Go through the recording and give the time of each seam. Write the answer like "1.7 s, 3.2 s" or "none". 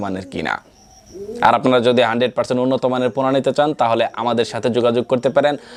none